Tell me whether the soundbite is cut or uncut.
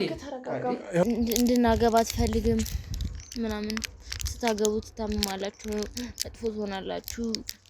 cut